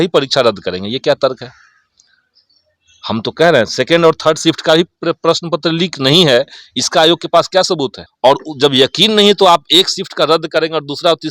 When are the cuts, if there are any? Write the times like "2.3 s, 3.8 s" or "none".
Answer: 8.0 s